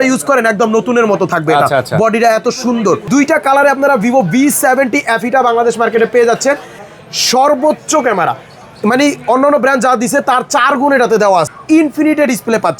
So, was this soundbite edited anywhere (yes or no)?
yes